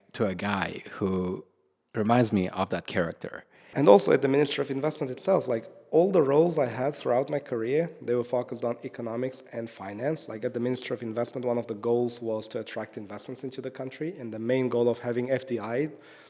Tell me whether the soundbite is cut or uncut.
cut